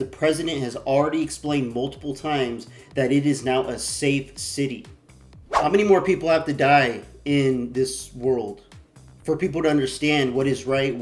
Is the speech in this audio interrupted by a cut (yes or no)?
yes